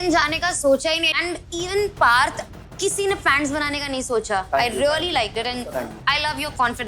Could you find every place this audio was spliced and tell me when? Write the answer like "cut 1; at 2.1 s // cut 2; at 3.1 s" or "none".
cut 1; at 1.1 s // cut 2; at 4.5 s